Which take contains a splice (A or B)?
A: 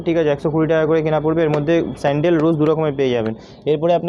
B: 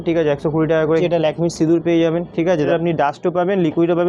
B